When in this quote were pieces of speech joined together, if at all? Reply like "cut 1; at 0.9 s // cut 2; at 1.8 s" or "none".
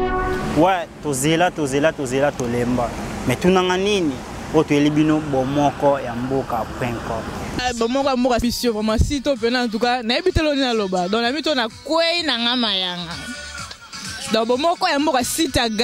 none